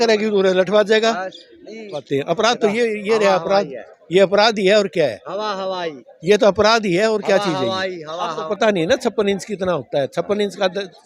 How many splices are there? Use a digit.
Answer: 2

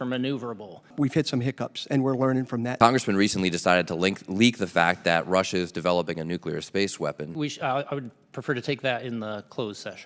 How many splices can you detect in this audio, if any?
3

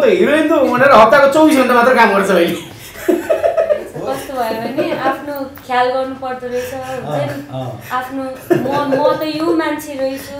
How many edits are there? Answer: 1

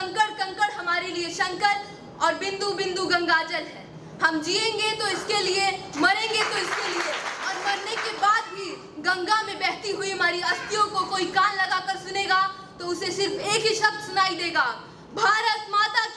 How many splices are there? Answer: 1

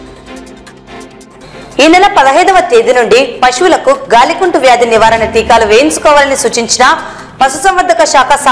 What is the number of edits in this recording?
1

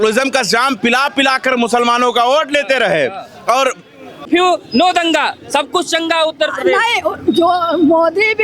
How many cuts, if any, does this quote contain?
1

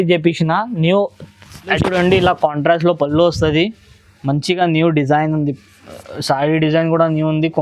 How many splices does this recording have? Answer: 1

